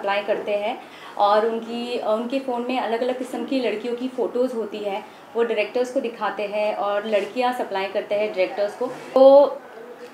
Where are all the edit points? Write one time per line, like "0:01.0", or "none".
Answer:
0:09.2